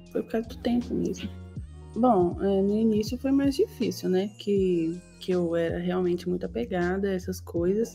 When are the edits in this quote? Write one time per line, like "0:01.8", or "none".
0:01.5